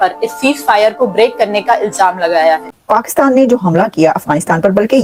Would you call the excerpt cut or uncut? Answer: uncut